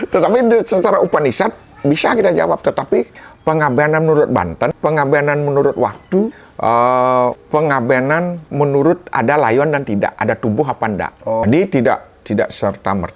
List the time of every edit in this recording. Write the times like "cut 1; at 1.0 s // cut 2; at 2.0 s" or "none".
cut 1; at 3.2 s // cut 2; at 4.8 s // cut 3; at 6.4 s // cut 4; at 7.4 s // cut 5; at 8.4 s // cut 6; at 11.4 s